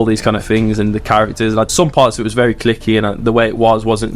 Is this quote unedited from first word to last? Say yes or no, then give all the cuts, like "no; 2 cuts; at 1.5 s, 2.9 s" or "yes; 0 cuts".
no; 1 cut; at 1.7 s